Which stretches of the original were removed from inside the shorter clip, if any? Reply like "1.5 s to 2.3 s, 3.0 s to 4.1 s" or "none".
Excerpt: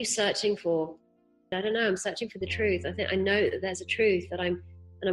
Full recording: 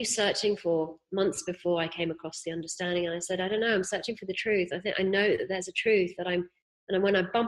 1.1 s to 3.0 s

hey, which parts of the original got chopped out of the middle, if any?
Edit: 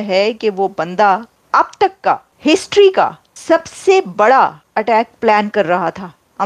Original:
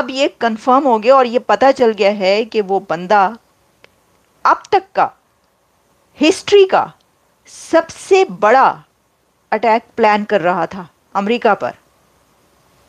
3.5 s to 4.3 s, 5.2 s to 6.1 s, 7.0 s to 7.5 s, 8.9 s to 9.4 s

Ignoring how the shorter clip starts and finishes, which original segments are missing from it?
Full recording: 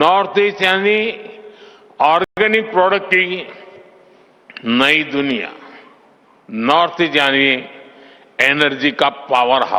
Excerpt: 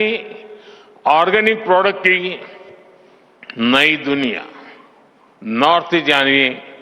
2.2 s to 2.4 s

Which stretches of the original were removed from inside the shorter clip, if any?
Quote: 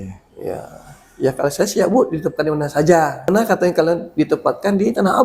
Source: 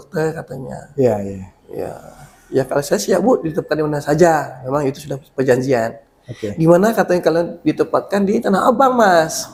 4.6 s to 6.8 s

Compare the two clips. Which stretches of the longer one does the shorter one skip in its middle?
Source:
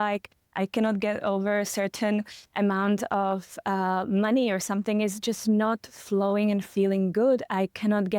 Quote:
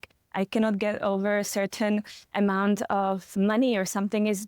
3.5 s to 4.1 s

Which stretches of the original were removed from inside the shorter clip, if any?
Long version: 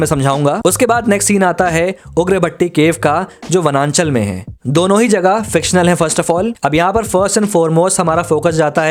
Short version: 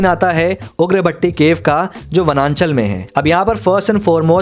4.4 s to 6.5 s

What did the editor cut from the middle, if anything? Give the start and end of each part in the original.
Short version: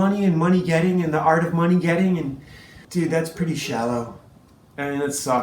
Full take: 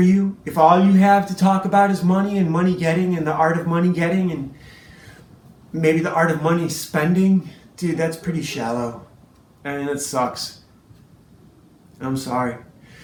4.9 s to 7.6 s

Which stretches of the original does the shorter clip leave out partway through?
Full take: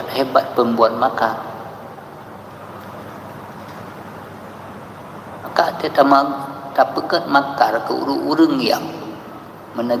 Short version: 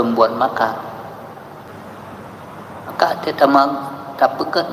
2.3 s to 4.2 s

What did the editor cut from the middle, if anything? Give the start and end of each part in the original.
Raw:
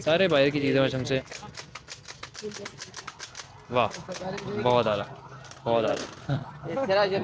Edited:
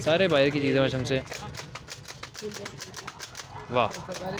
none

